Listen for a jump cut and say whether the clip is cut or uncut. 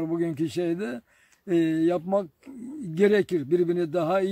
uncut